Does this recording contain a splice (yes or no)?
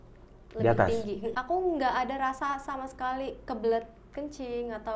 yes